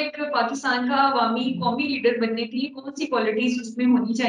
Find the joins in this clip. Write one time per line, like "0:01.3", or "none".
none